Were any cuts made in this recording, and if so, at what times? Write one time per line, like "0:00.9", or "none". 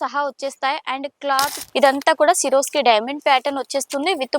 0:01.6

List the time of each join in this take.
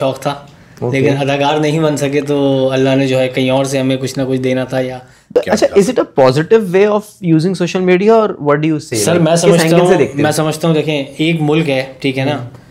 0:05.1

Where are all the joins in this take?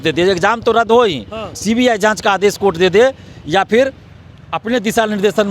none

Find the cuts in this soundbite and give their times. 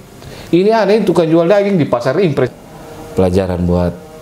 0:02.5

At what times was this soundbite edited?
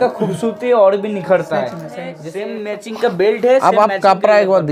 0:02.2

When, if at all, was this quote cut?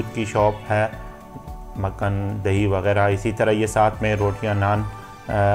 none

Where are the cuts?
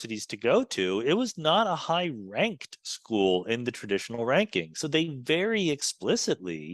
0:04.8

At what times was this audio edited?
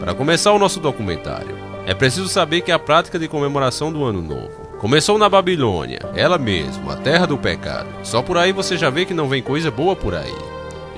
none

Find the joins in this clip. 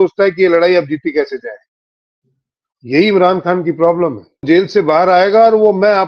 0:04.4

